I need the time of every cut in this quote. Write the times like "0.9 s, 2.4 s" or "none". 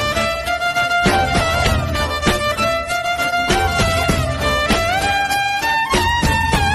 none